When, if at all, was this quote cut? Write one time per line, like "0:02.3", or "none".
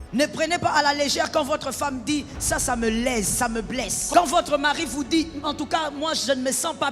0:04.0